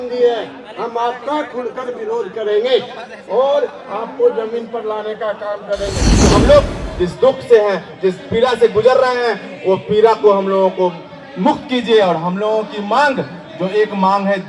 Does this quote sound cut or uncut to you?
cut